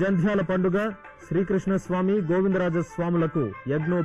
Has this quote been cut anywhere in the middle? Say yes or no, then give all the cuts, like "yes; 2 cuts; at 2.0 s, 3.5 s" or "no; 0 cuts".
no; 0 cuts